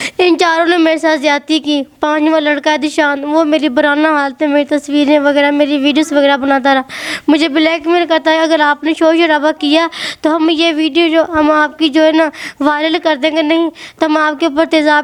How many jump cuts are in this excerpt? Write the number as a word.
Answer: zero